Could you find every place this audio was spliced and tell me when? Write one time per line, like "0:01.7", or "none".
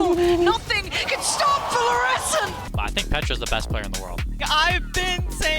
0:02.6
0:04.4